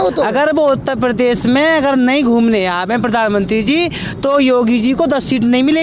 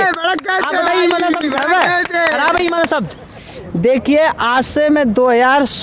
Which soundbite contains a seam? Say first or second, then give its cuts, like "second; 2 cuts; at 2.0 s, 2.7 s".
second; 1 cut; at 3.6 s